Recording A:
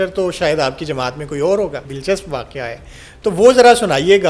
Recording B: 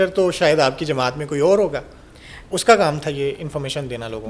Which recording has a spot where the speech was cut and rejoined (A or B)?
A